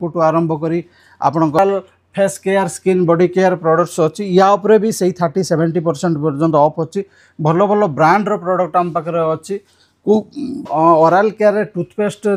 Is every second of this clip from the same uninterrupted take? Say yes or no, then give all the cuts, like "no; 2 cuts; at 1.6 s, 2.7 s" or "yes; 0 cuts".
no; 2 cuts; at 1.6 s, 10.7 s